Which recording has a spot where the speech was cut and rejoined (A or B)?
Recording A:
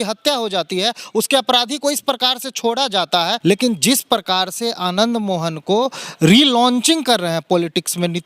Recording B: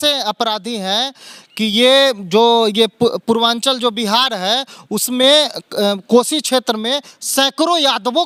A